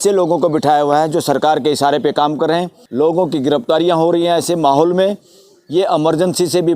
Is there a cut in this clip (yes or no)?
yes